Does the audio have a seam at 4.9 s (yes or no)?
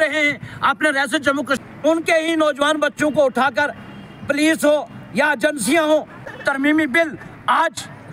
no